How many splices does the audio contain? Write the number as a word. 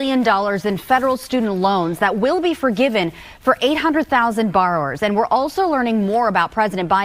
zero